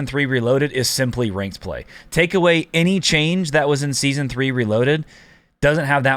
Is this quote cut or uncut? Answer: uncut